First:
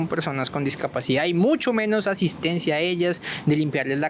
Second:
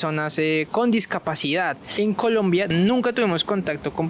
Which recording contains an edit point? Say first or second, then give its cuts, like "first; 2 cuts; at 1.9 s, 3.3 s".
second; 2 cuts; at 1.9 s, 2.7 s